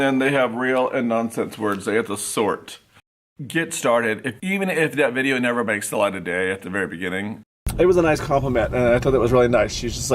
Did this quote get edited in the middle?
yes; 2 cuts; at 3.4 s, 7.6 s

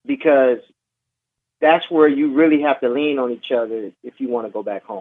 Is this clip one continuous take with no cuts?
yes; 0 cuts

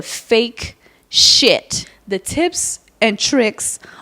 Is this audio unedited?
no; 1 cut; at 1.9 s

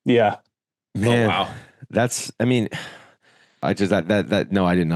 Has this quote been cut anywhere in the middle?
no; 0 cuts

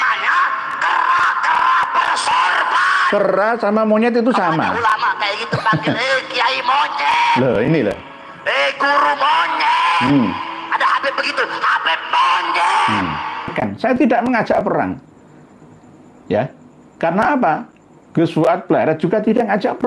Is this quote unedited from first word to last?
no; 1 cut; at 13.5 s

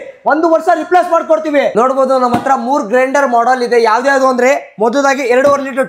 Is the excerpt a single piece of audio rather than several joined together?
no; 1 cut; at 1.7 s

